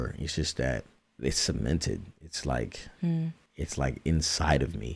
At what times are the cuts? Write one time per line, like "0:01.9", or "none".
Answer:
0:01.0
0:03.4